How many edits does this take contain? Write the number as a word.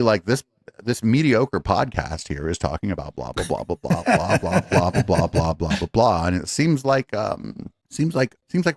zero